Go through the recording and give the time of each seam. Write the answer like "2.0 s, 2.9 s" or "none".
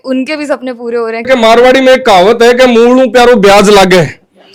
none